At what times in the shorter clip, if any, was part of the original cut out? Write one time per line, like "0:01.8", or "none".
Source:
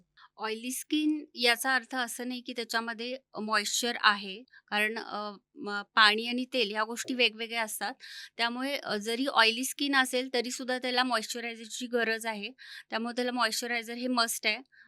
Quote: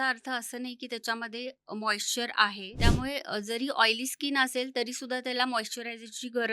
0:02.7